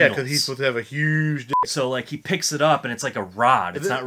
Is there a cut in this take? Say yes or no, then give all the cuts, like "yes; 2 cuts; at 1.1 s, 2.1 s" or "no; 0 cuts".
no; 0 cuts